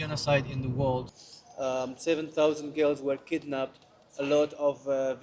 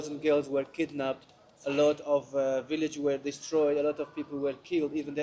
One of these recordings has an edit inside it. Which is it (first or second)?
first